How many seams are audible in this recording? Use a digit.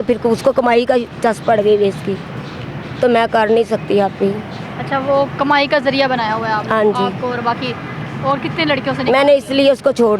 0